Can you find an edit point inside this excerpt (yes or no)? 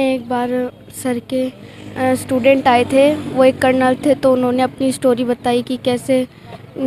no